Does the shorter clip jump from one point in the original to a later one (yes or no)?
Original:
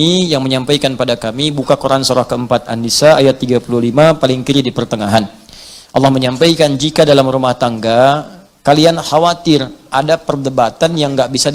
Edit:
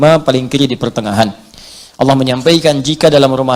no